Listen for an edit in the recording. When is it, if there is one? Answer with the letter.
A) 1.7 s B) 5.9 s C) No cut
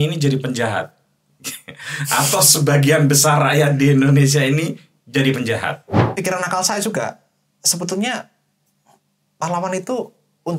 B